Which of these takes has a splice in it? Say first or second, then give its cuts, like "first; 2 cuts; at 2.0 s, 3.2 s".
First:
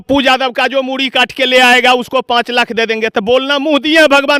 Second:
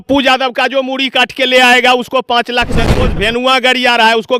second; 1 cut; at 2.9 s